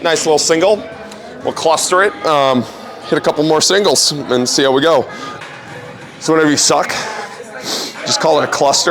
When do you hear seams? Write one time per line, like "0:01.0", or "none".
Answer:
0:05.2